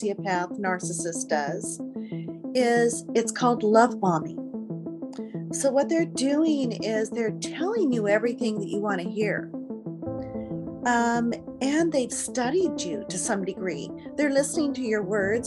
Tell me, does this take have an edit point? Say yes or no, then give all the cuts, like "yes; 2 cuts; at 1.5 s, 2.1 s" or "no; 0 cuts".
no; 0 cuts